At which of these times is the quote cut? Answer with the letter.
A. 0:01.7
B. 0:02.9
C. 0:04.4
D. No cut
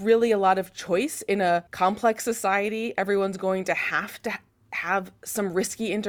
A